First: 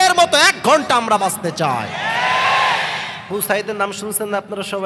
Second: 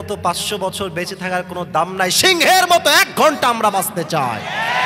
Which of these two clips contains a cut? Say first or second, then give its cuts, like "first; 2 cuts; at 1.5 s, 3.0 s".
first; 1 cut; at 3.3 s